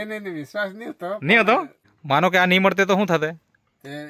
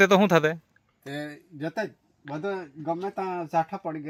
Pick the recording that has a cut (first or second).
first